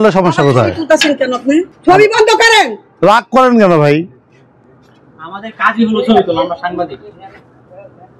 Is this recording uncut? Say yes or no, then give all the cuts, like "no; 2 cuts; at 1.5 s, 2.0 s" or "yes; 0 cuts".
no; 1 cut; at 1.7 s